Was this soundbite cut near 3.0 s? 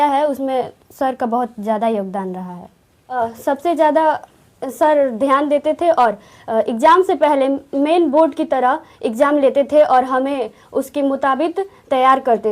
yes; 1 cut; at 3.0 s

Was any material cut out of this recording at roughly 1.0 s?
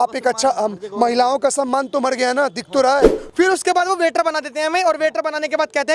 no; 1 cut; at 3.2 s

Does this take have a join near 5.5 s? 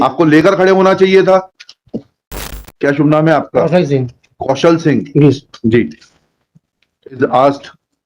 no; 1 cut; at 2.7 s

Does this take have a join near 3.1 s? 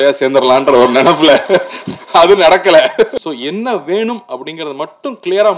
yes; 1 cut; at 3.1 s

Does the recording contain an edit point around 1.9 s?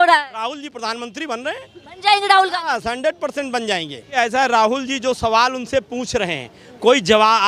no; 1 cut; at 4.2 s

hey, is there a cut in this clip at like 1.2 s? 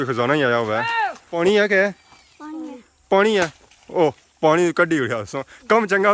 yes; 1 cut; at 1.2 s

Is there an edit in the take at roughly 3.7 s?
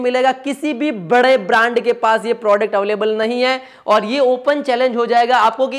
no; 0 cuts

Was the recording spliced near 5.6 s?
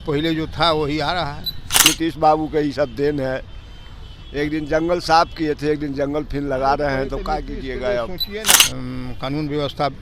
no; 2 cuts; at 1.8 s, 8.6 s

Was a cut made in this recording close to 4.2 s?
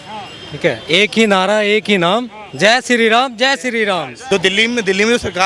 yes; 1 cut; at 4.2 s

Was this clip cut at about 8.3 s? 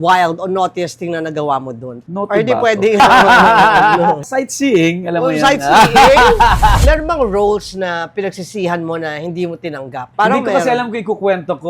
no; 4 cuts; at 1.9 s, 3.0 s, 6.8 s, 10.0 s

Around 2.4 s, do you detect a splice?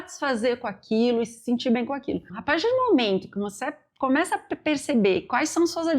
yes; 1 cut; at 2.4 s

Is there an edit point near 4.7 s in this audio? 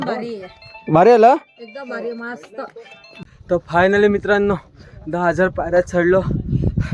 no; 1 cut; at 3.3 s

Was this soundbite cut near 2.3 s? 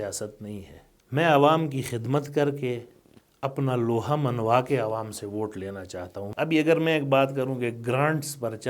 no; 1 cut; at 6.2 s

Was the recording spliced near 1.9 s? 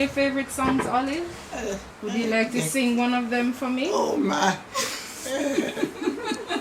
yes; 1 cut; at 1.9 s

